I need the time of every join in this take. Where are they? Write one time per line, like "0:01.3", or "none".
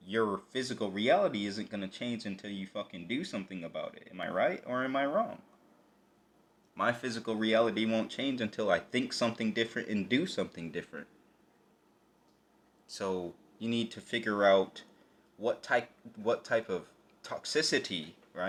none